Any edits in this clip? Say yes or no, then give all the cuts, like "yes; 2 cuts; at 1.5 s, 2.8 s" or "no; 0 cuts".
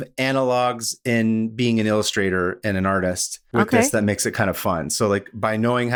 no; 0 cuts